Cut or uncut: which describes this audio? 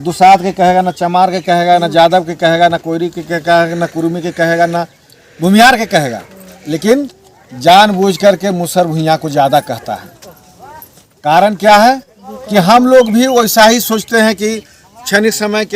uncut